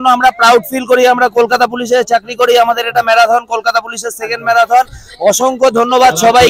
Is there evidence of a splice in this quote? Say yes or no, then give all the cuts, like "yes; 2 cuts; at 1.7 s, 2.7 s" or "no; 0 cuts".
no; 0 cuts